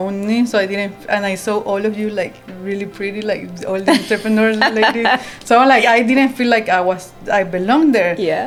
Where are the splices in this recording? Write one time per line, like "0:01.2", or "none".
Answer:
none